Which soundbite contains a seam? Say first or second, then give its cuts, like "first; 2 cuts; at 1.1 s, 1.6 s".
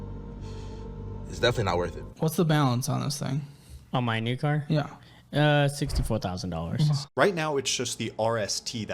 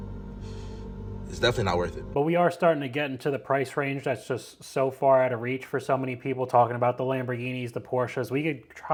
first; 2 cuts; at 2.0 s, 7.1 s